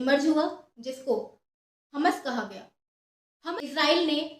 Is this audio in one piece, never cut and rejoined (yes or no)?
no